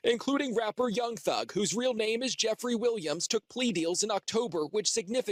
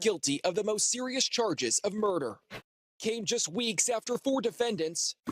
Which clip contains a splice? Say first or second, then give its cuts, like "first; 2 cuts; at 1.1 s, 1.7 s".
second; 1 cut; at 2.8 s